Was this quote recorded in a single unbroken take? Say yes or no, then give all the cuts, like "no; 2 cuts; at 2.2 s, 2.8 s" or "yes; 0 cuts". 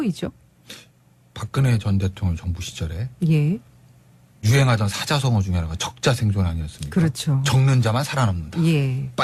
yes; 0 cuts